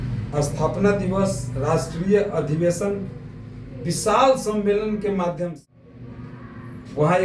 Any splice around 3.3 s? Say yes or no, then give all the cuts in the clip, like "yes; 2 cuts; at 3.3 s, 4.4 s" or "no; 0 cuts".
no; 1 cut; at 5.6 s